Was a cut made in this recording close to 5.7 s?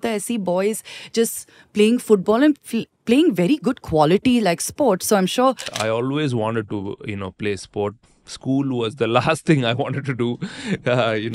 yes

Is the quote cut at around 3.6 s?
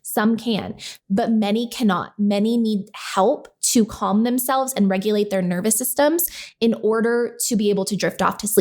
no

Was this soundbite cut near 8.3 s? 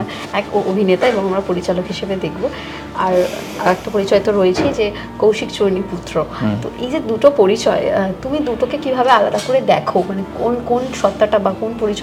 no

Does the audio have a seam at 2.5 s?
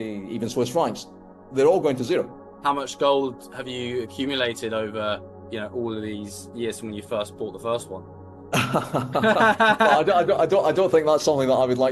yes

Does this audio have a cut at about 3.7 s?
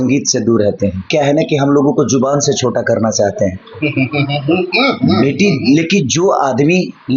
no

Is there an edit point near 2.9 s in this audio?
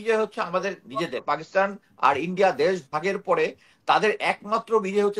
no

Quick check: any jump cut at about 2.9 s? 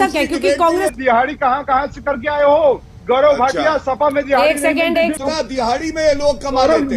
yes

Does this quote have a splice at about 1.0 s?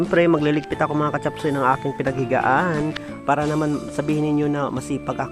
no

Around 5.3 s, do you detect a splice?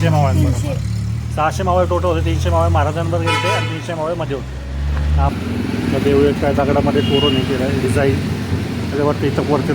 yes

